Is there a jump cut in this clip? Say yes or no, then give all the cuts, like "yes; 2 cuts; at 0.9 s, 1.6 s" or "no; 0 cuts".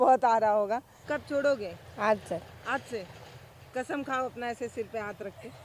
yes; 1 cut; at 0.9 s